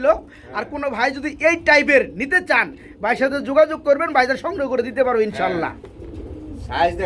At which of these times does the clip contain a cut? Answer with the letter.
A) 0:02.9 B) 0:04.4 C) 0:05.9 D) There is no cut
D